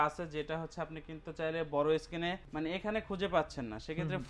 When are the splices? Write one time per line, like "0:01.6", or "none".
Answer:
0:02.4